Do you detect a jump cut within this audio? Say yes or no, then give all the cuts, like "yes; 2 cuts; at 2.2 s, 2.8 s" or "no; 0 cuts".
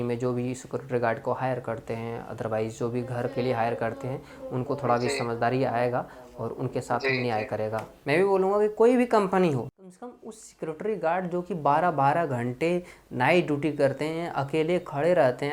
yes; 2 cuts; at 7.9 s, 9.7 s